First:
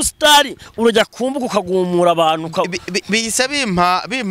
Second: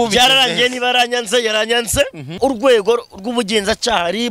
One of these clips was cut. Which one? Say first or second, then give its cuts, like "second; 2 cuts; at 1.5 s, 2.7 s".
second; 1 cut; at 2.3 s